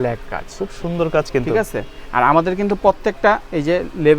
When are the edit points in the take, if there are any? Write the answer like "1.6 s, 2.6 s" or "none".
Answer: none